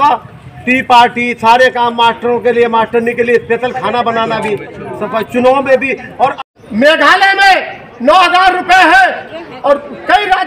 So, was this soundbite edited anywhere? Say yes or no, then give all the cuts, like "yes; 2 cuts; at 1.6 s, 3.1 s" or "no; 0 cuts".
yes; 1 cut; at 6.6 s